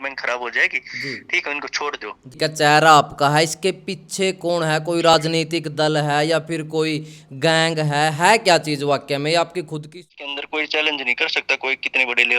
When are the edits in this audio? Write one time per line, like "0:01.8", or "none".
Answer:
0:02.3
0:10.1